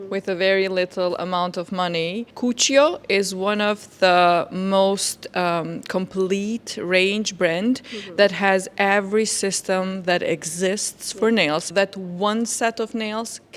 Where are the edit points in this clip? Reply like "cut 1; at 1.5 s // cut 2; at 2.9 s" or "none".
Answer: cut 1; at 2.3 s // cut 2; at 11.7 s